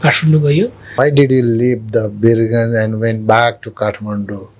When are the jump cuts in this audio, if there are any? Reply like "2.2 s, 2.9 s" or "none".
1.0 s